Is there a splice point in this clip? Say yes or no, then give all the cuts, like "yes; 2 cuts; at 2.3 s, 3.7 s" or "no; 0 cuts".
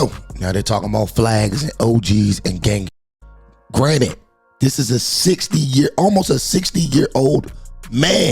yes; 1 cut; at 2.9 s